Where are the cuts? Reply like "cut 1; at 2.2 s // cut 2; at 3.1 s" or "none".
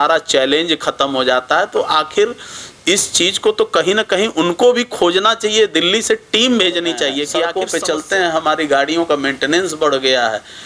cut 1; at 7.4 s